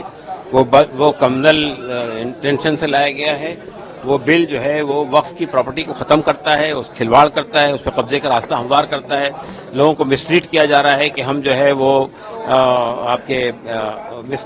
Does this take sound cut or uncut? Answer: uncut